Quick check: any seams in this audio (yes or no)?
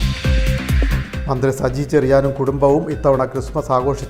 yes